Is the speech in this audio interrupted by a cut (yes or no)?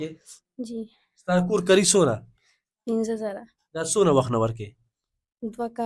no